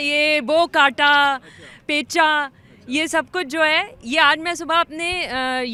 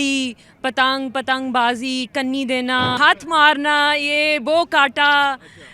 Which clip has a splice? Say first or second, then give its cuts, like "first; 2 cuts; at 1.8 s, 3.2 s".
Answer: second; 1 cut; at 3.0 s